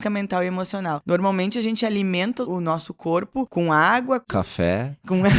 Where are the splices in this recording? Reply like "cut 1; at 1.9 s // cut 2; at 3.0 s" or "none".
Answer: cut 1; at 1.0 s // cut 2; at 2.5 s // cut 3; at 3.5 s // cut 4; at 4.4 s